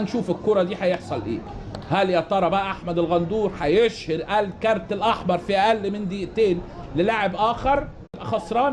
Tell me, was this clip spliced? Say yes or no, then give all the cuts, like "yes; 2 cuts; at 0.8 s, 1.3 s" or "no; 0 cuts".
no; 0 cuts